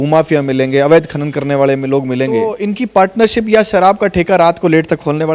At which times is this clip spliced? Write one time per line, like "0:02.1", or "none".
0:02.6